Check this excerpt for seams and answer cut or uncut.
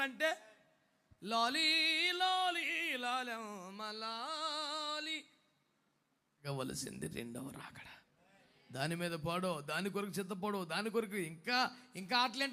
cut